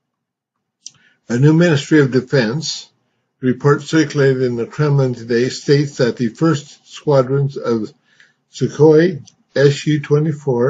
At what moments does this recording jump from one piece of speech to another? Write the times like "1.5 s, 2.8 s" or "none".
2.3 s